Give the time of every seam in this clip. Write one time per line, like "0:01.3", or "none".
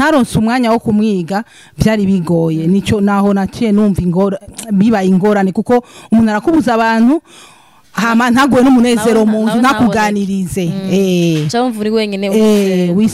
none